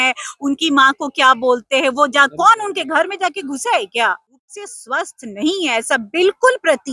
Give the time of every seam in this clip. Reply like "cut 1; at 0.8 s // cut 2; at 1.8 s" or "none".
cut 1; at 4.3 s